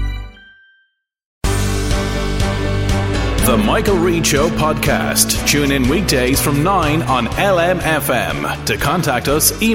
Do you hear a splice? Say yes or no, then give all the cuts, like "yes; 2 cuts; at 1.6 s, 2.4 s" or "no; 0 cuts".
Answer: yes; 1 cut; at 1.4 s